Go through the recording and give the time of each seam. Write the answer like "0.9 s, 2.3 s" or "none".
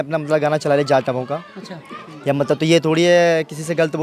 none